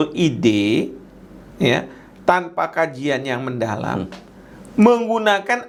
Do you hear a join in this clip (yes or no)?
no